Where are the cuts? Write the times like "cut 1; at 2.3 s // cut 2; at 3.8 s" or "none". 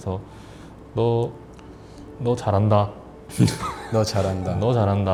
none